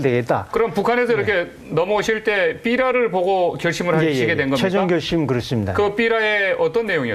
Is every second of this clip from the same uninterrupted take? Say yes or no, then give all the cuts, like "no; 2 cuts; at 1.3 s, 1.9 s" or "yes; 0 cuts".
no; 1 cut; at 1.1 s